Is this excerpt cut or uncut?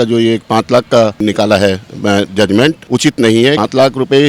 cut